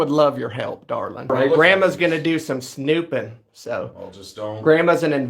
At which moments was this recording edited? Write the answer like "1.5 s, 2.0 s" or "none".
1.3 s